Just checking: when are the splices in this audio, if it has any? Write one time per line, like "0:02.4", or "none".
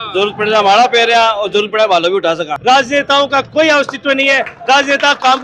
0:02.5